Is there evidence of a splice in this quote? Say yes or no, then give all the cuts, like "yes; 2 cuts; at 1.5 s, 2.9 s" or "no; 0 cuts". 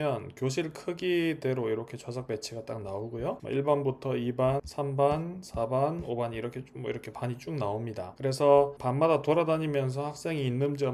no; 0 cuts